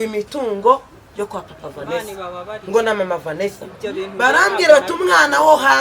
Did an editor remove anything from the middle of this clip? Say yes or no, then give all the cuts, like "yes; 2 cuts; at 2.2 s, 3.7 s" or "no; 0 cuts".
no; 0 cuts